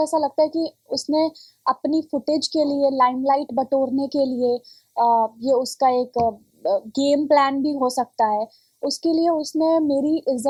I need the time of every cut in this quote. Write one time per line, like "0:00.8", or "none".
none